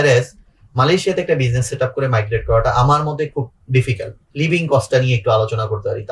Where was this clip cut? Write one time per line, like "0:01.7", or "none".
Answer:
0:04.2